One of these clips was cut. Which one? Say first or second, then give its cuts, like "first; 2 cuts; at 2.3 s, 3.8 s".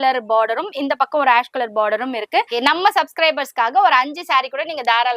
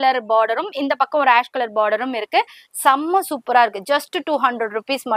first; 1 cut; at 2.5 s